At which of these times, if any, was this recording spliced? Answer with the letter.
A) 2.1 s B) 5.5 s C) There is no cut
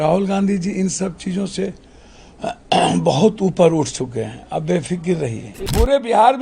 B